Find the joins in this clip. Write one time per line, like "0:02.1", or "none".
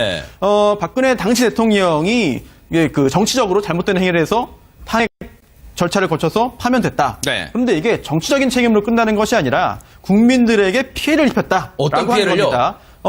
0:03.5